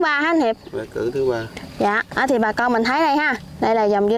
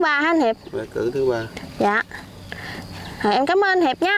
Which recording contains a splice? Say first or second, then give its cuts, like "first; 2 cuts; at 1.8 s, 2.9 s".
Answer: first; 1 cut; at 2.1 s